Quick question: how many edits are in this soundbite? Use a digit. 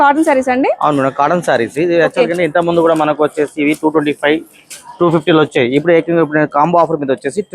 0